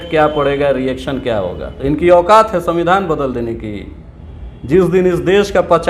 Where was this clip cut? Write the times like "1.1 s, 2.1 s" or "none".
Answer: 1.7 s